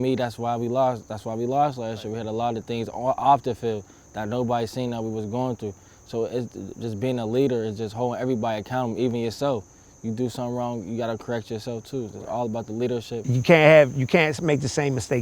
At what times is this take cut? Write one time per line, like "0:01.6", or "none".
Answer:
0:13.3